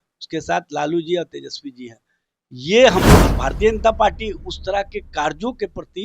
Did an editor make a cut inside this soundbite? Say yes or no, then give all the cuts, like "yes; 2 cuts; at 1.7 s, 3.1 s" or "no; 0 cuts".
yes; 1 cut; at 3.1 s